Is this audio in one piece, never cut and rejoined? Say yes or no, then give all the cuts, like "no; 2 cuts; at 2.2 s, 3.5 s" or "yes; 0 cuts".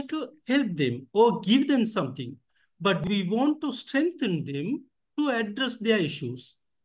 yes; 0 cuts